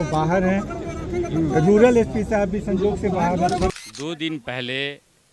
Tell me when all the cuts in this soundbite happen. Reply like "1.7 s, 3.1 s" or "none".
3.7 s